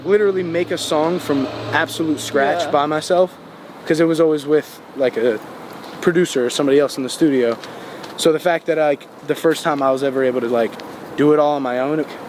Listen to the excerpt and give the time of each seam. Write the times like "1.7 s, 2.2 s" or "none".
none